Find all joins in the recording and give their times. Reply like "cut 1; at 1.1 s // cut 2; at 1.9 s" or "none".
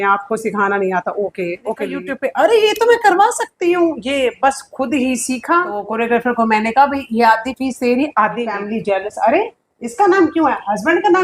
cut 1; at 2.0 s // cut 2; at 5.9 s // cut 3; at 8.6 s